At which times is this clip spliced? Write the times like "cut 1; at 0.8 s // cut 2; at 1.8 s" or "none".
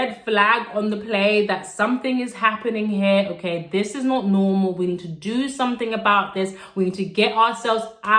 none